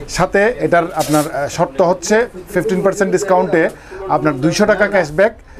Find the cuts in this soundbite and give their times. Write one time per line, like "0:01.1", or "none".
none